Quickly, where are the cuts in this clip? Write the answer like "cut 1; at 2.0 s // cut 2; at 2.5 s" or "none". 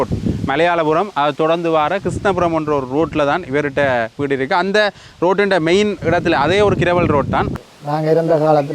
cut 1; at 7.5 s